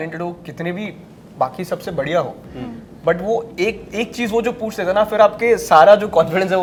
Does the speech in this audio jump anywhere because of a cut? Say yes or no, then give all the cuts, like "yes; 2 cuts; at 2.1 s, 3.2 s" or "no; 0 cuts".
no; 0 cuts